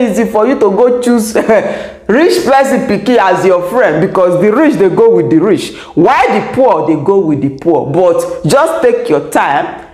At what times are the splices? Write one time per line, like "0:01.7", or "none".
none